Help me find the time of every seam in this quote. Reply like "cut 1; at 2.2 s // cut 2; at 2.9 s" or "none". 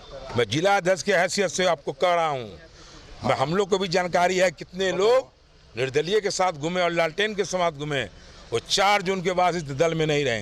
none